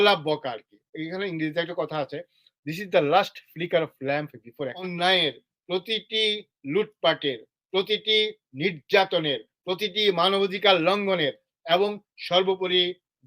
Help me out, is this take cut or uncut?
cut